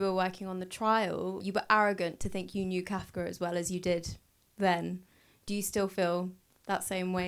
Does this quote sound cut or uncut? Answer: cut